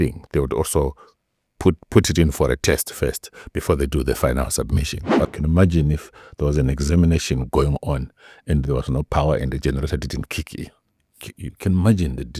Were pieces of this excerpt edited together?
yes; 1 cut; at 5.3 s

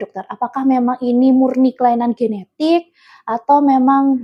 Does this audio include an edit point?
no; 0 cuts

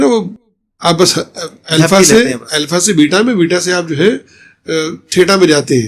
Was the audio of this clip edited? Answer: no; 0 cuts

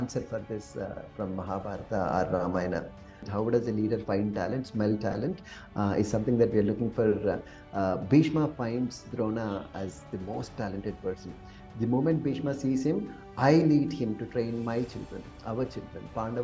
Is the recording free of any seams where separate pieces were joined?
no; 1 cut; at 3.3 s

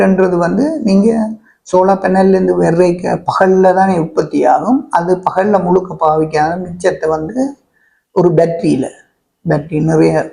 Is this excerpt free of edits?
yes; 0 cuts

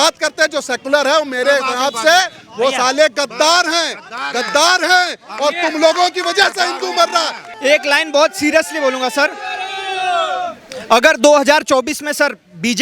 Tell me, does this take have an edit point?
yes; 1 cut; at 7.5 s

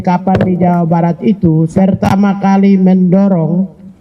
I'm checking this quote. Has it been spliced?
yes; 1 cut; at 1.7 s

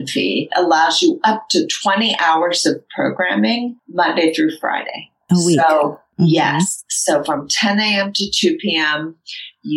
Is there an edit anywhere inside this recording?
yes; 1 cut; at 3.8 s

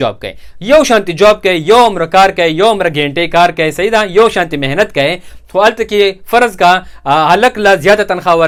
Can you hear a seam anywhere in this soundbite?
no; 0 cuts

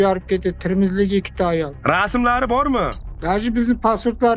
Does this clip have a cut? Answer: yes; 1 cut; at 3.0 s

